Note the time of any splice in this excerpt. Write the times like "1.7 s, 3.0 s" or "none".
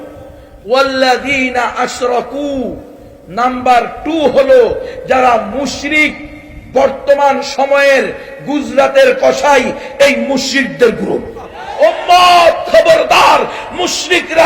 11.6 s